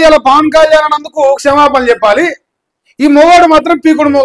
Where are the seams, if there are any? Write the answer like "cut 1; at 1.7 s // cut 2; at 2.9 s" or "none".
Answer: none

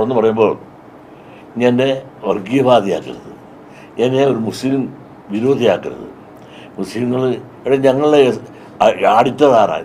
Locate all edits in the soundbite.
none

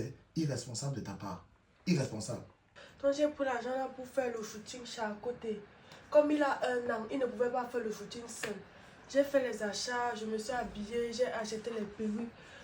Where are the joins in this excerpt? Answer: cut 1; at 2.8 s

